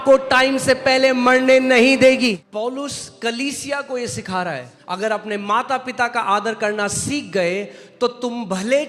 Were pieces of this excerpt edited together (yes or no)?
yes